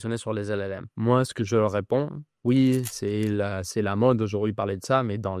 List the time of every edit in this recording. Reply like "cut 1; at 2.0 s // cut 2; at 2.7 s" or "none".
cut 1; at 1.0 s // cut 2; at 2.3 s

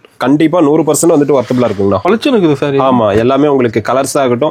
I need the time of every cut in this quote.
cut 1; at 2.0 s

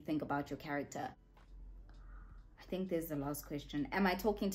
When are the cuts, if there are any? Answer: cut 1; at 1.3 s

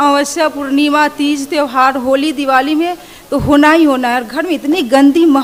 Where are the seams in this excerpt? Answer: none

